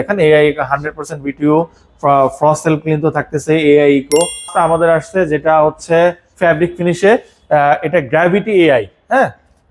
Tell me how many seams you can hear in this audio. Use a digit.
1